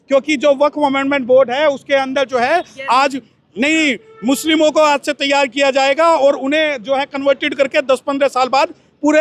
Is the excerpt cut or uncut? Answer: uncut